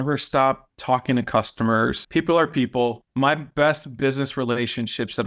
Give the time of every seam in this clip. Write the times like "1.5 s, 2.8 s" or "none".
2.0 s, 3.0 s